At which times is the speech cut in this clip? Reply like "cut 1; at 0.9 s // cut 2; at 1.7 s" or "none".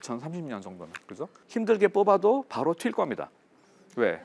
cut 1; at 1.4 s

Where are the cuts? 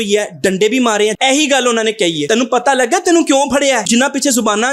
cut 1; at 1.1 s // cut 2; at 2.2 s // cut 3; at 3.9 s

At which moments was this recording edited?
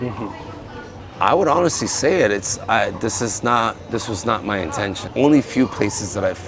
cut 1; at 1.0 s // cut 2; at 5.0 s

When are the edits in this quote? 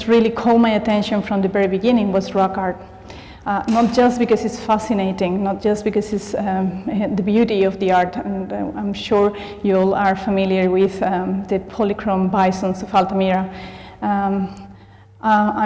cut 1; at 3.7 s

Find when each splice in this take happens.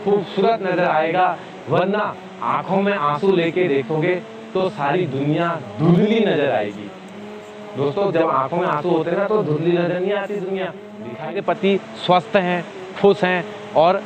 cut 1; at 11.4 s

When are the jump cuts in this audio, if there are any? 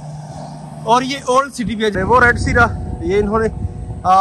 cut 1; at 1.9 s

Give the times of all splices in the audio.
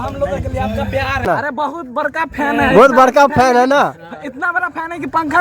cut 1; at 1.2 s

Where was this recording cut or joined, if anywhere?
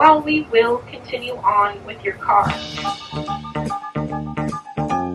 cut 1; at 2.6 s

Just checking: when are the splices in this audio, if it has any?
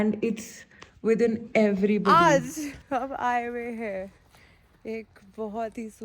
cut 1; at 2.1 s

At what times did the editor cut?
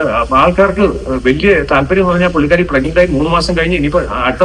none

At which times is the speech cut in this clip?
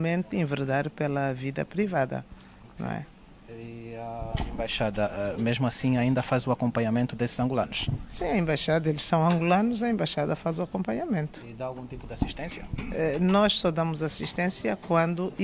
none

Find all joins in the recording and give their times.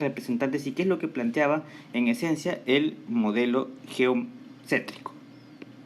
cut 1; at 1.2 s

